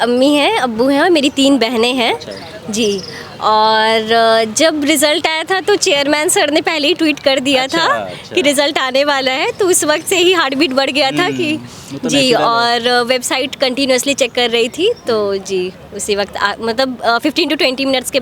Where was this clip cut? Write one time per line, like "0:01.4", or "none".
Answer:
none

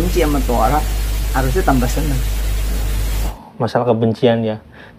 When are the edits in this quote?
0:03.3

